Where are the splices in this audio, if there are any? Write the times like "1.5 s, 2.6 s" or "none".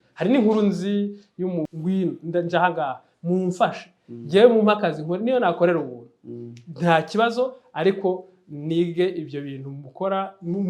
1.7 s